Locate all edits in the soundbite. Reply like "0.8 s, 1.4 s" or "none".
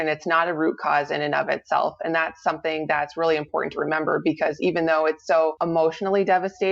5.6 s